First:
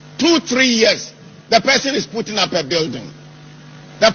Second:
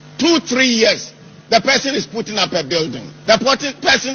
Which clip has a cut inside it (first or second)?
second